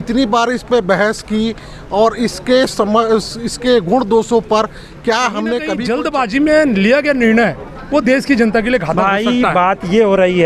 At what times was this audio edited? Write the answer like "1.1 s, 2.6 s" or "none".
5.8 s